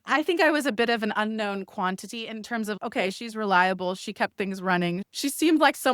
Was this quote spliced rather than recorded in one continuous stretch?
no; 0 cuts

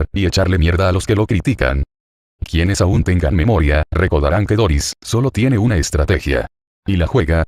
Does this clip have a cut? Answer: yes; 1 cut; at 2.1 s

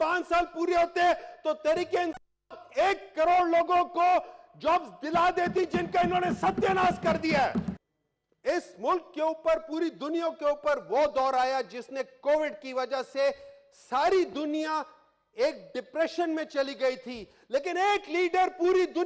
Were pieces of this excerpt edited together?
yes; 1 cut; at 7.8 s

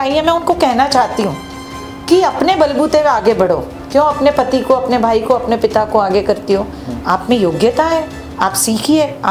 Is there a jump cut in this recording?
no; 0 cuts

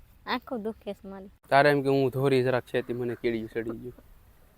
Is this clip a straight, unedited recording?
no; 1 cut; at 1.3 s

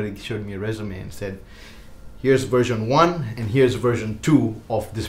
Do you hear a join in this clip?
no; 0 cuts

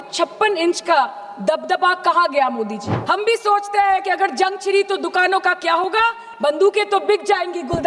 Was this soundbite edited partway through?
yes; 1 cut; at 2.9 s

